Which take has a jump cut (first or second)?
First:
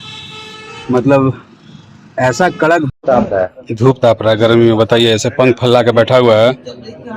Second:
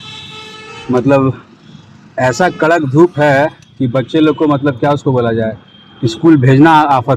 first